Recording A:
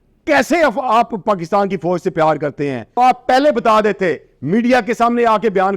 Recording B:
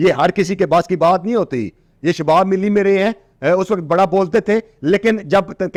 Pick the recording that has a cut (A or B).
A